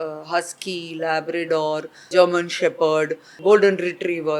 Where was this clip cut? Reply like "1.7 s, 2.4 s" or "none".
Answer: 2.0 s, 3.3 s